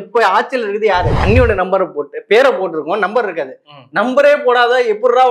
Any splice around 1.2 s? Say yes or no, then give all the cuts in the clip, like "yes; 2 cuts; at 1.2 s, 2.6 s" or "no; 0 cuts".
yes; 1 cut; at 1.2 s